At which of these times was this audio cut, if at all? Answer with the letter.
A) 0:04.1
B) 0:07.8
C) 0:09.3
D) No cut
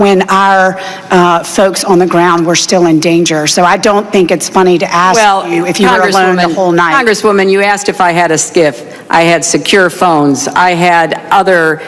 A